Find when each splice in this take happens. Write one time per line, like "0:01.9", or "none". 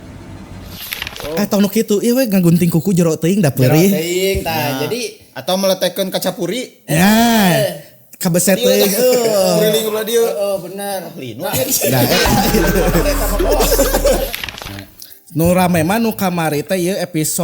0:01.2
0:14.5